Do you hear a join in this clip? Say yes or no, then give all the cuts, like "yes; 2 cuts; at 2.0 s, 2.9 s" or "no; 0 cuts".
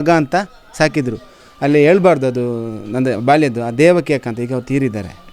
no; 0 cuts